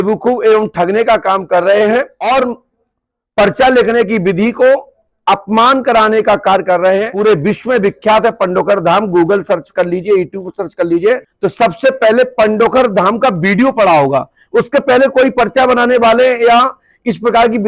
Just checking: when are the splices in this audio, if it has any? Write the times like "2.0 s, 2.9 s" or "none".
2.2 s, 7.1 s, 11.4 s